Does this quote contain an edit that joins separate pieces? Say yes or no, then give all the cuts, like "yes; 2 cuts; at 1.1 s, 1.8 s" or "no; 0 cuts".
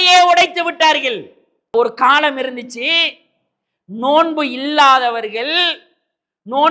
yes; 1 cut; at 1.7 s